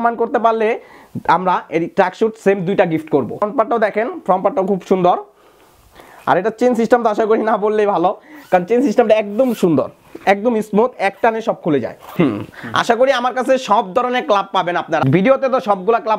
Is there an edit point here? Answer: yes; 3 cuts; at 3.4 s, 12.1 s, 15.0 s

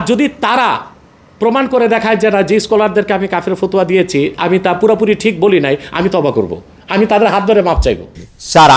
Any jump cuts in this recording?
no; 0 cuts

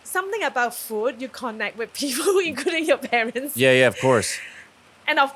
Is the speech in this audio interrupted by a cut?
no; 0 cuts

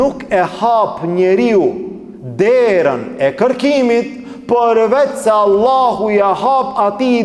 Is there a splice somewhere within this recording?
no; 0 cuts

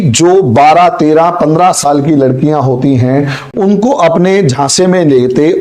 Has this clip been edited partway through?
yes; 1 cut; at 3.4 s

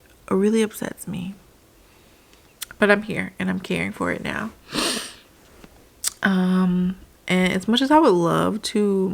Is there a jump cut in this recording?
no; 0 cuts

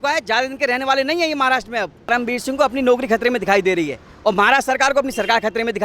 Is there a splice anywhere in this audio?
yes; 1 cut; at 2.1 s

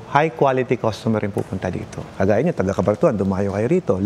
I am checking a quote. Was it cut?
no; 0 cuts

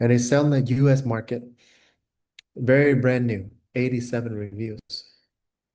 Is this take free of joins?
no; 1 cut; at 3.5 s

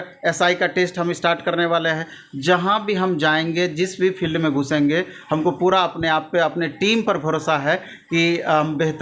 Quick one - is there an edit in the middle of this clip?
no; 0 cuts

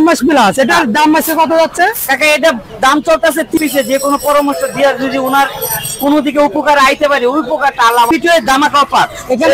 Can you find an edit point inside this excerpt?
yes; 2 cuts; at 3.6 s, 8.1 s

